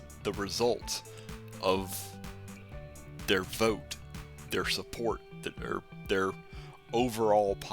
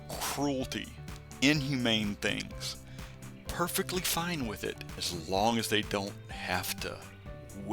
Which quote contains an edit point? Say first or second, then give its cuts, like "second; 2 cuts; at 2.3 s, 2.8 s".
second; 1 cut; at 4.9 s